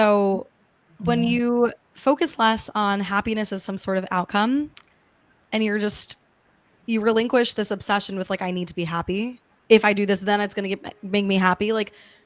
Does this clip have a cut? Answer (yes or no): no